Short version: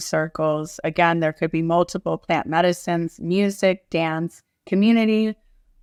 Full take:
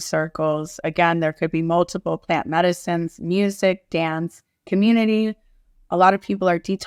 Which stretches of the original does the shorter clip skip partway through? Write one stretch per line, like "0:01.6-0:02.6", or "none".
none